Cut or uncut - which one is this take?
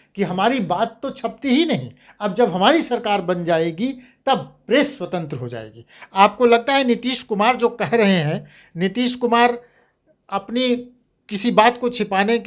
uncut